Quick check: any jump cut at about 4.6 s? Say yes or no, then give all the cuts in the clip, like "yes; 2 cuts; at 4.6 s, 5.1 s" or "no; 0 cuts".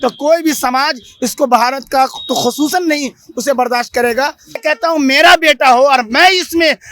yes; 1 cut; at 4.6 s